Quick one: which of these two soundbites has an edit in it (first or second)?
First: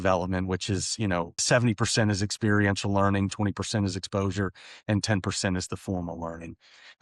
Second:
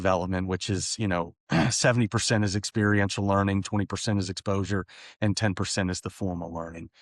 first